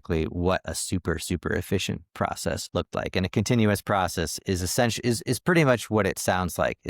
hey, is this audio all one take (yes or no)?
no